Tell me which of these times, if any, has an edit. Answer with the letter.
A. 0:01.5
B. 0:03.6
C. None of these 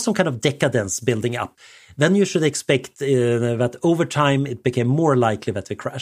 A